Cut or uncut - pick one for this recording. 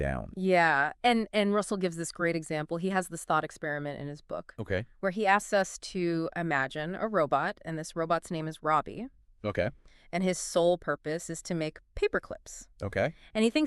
uncut